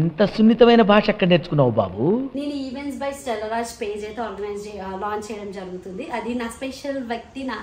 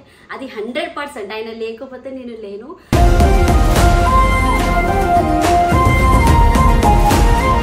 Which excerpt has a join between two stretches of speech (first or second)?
first